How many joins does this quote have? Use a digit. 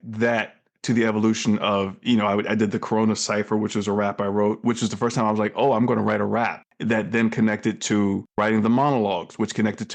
2